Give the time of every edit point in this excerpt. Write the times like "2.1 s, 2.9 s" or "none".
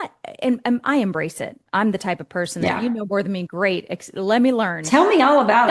none